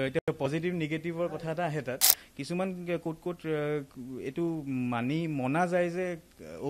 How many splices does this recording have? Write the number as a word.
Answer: one